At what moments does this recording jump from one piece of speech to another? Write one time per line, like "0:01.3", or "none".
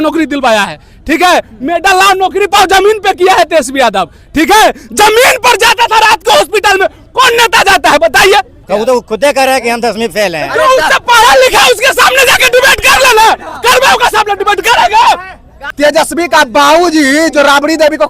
0:08.6
0:15.6